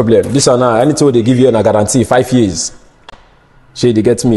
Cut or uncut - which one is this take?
uncut